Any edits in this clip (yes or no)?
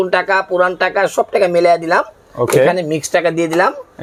no